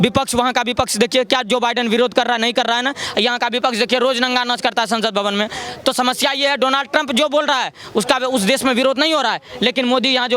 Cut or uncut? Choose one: uncut